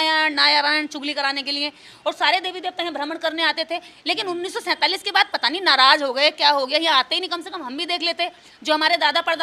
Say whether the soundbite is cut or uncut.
uncut